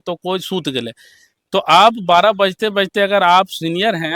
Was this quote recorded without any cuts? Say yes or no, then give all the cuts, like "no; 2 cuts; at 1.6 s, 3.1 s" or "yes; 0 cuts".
yes; 0 cuts